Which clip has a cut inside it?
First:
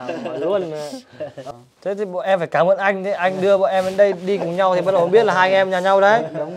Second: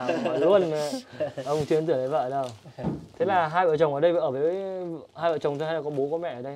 first; 1 cut; at 1.4 s

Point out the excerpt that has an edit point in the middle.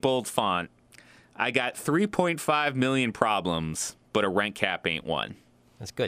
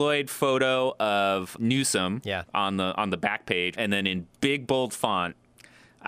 second; 2 cuts; at 1.5 s, 3.7 s

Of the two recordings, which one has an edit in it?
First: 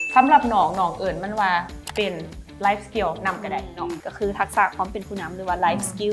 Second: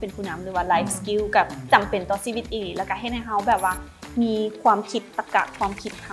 first; 1 cut; at 4.0 s

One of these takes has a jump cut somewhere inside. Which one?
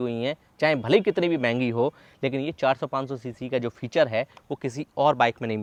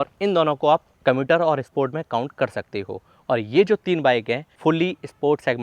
second; 2 cuts; at 0.9 s, 4.5 s

